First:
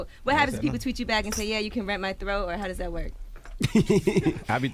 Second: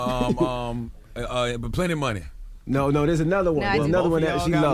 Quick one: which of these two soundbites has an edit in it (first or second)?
second